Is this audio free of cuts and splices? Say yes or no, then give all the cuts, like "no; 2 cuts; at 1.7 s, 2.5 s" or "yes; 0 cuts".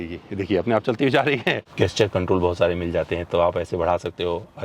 no; 1 cut; at 1.7 s